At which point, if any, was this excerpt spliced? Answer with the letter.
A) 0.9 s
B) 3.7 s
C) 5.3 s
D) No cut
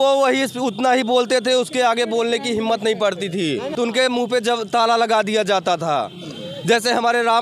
B